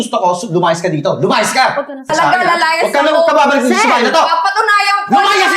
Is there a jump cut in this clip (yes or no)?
yes